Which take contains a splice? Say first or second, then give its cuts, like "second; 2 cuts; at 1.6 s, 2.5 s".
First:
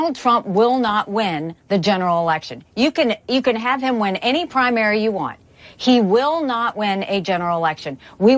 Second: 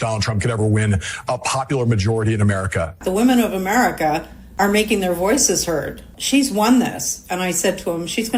second; 3 cuts; at 3.0 s, 4.4 s, 6.1 s